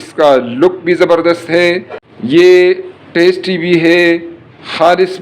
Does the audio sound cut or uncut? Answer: cut